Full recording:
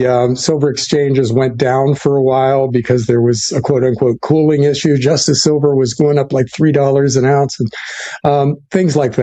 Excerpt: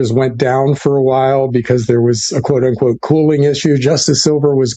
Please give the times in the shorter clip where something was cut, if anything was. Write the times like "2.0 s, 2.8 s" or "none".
none